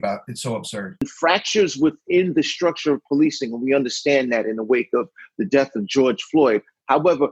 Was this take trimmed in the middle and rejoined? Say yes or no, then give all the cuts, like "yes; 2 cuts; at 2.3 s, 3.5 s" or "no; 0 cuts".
yes; 1 cut; at 1.1 s